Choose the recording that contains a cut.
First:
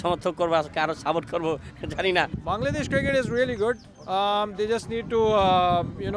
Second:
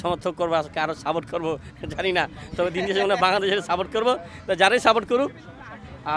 first; 1 cut; at 2.4 s

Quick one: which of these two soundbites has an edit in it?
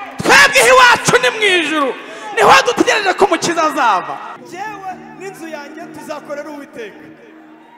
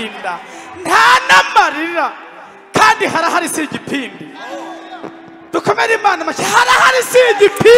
first; 1 cut; at 4.4 s

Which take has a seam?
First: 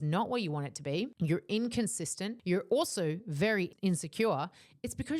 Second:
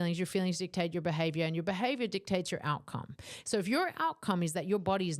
first; 3 cuts; at 1.1 s, 2.3 s, 3.7 s

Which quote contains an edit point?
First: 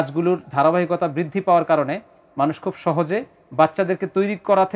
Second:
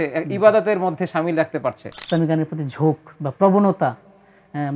second; 1 cut; at 1.9 s

